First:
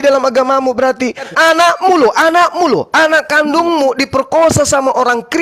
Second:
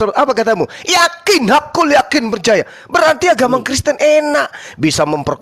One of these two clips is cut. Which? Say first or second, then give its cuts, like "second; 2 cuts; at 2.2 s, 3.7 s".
first; 1 cut; at 1.3 s